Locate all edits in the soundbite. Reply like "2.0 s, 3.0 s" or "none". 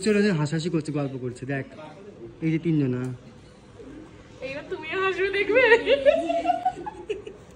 none

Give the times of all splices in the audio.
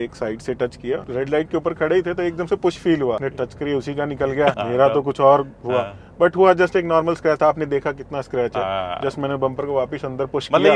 1.1 s, 3.3 s, 4.6 s

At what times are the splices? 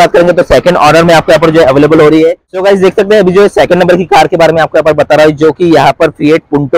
2.5 s

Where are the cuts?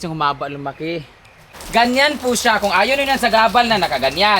1.5 s

